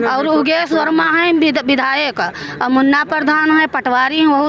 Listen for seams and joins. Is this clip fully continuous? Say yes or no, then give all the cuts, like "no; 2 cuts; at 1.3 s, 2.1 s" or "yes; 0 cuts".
yes; 0 cuts